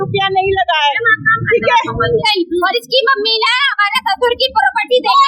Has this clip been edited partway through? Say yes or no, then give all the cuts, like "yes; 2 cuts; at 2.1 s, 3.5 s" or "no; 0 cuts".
yes; 1 cut; at 2.2 s